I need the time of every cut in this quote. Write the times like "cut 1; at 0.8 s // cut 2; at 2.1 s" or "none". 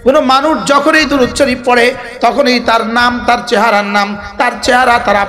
none